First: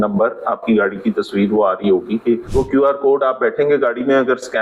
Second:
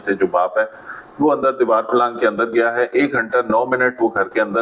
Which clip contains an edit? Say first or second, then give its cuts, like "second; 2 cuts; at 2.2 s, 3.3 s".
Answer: first; 1 cut; at 2.4 s